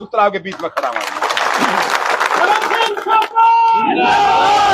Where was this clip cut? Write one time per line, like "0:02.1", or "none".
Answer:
none